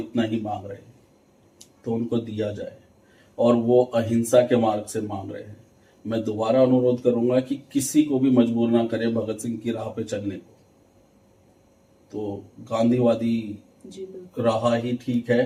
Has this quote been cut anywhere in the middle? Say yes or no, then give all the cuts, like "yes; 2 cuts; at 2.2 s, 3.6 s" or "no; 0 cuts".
no; 0 cuts